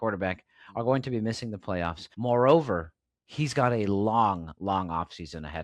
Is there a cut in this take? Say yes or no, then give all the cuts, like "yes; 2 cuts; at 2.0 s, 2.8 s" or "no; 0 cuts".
yes; 1 cut; at 2.0 s